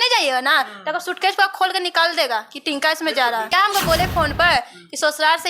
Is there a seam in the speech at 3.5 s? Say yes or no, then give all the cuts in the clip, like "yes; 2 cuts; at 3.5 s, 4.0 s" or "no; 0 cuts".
yes; 1 cut; at 3.5 s